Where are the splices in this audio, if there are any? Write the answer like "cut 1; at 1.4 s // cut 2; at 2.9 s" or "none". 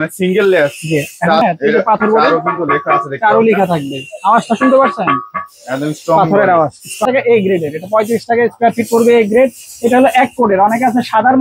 cut 1; at 1.4 s // cut 2; at 7.0 s